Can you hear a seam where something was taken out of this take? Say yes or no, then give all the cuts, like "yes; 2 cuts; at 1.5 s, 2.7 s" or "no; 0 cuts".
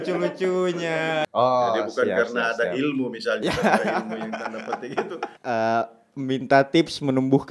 yes; 2 cuts; at 1.3 s, 5.4 s